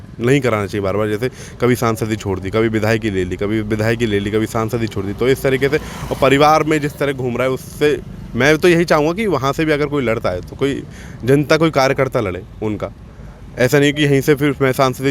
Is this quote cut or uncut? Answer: uncut